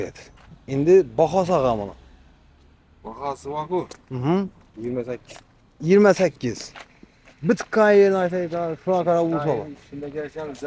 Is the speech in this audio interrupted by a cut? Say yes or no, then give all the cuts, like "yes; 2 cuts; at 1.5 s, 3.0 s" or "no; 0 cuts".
no; 0 cuts